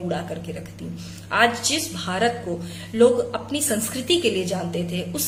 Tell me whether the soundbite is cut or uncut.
uncut